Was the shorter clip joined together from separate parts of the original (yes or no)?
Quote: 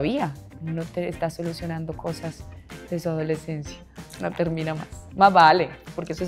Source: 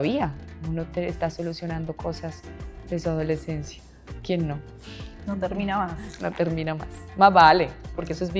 yes